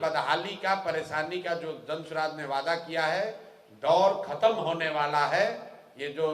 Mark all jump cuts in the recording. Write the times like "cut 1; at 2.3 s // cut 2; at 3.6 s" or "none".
none